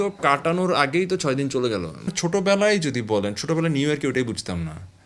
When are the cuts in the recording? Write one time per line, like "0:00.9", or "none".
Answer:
0:02.1